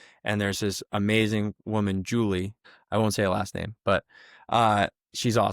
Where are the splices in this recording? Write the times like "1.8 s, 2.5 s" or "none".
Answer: 2.6 s